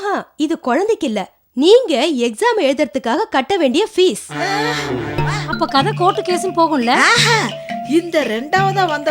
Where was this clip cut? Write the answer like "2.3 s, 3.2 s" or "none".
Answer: 5.4 s